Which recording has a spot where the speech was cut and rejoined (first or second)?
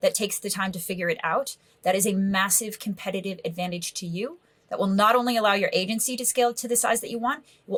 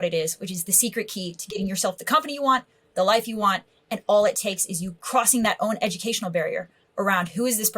second